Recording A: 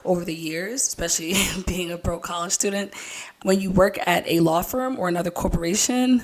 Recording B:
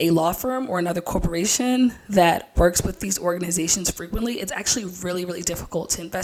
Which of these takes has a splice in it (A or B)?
A